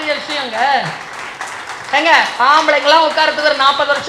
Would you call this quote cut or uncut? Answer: uncut